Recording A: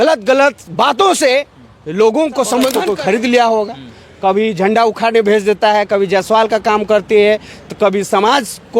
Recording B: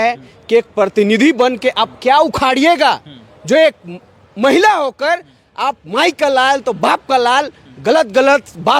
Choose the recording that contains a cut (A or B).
A